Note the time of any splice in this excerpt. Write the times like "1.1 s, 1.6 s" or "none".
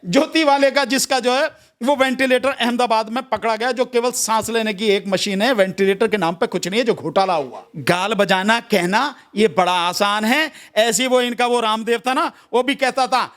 7.6 s